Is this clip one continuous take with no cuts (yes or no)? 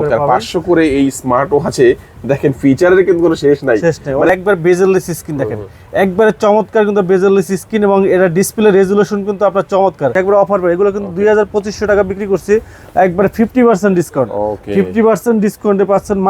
no